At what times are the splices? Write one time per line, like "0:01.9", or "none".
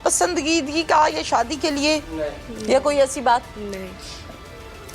0:03.5